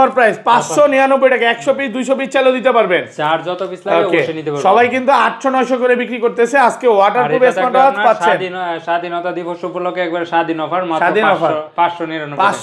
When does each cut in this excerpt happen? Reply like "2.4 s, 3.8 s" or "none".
none